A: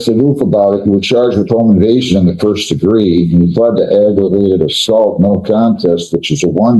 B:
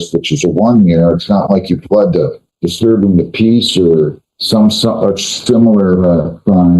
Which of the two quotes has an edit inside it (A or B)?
B